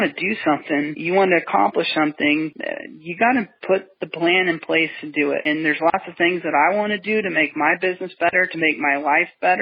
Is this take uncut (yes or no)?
no